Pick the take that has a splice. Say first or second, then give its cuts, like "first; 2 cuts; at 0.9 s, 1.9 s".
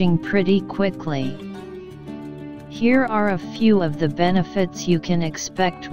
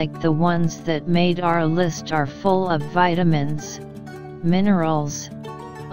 first; 2 cuts; at 1.3 s, 2.8 s